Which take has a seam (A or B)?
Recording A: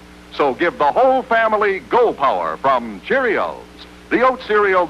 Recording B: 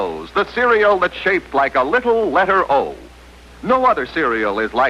A